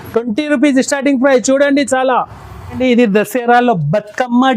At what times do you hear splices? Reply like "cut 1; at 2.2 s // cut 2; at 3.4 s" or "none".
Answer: cut 1; at 2.8 s

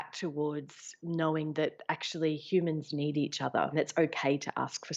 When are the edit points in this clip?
cut 1; at 3.7 s

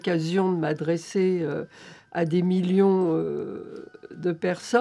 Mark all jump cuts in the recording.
none

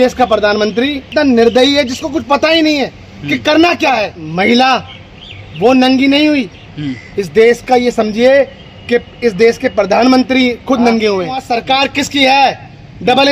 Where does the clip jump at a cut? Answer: cut 1; at 1.0 s // cut 2; at 4.2 s // cut 3; at 11.4 s

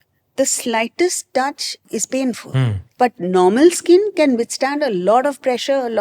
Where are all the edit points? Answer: cut 1; at 1.8 s // cut 2; at 2.8 s

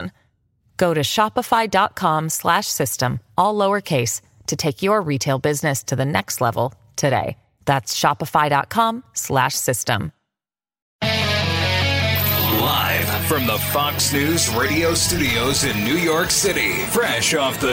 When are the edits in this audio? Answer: cut 1; at 10.7 s // cut 2; at 12.4 s

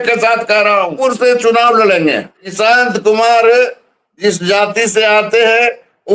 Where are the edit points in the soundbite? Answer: cut 1; at 1.0 s // cut 2; at 2.5 s

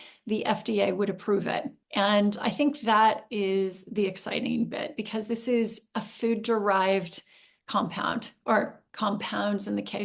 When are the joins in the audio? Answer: cut 1; at 1.8 s

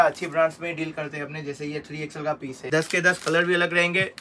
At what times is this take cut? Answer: cut 1; at 2.7 s

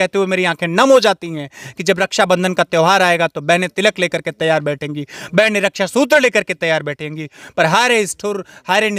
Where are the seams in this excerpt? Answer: none

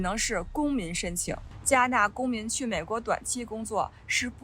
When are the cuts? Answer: cut 1; at 1.5 s

